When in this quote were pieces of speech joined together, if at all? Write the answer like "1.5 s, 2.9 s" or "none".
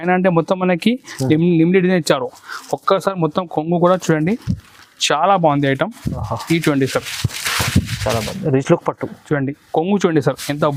none